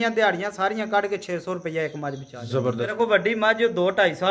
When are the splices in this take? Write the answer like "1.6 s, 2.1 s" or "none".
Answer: 2.9 s